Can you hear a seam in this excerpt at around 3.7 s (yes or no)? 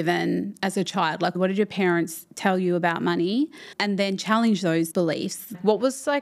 yes